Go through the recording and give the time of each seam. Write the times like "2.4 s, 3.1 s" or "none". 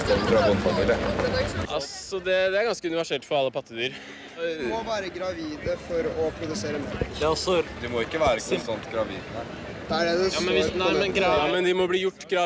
1.6 s